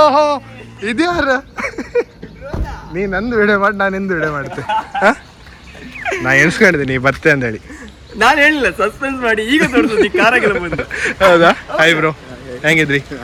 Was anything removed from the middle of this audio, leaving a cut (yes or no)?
no